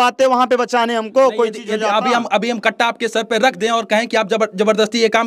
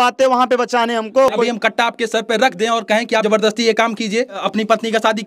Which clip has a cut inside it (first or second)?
second